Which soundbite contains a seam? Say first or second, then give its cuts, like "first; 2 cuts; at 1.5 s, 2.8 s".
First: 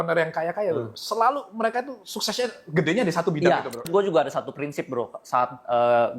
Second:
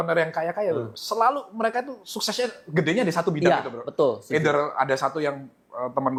first; 1 cut; at 3.9 s